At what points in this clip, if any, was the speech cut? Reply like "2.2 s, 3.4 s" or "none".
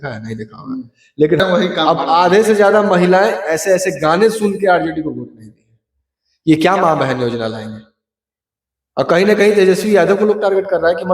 1.4 s